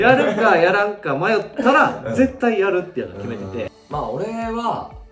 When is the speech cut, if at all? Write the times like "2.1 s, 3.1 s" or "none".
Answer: 3.8 s